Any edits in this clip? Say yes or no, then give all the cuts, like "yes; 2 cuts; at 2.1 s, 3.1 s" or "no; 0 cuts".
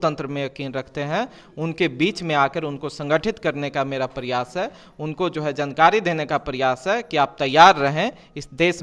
no; 0 cuts